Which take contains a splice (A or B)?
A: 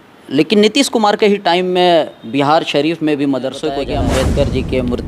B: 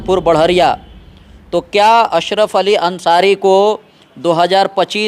A